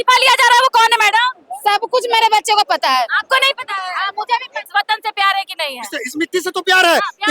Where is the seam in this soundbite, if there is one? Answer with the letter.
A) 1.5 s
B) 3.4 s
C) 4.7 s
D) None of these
C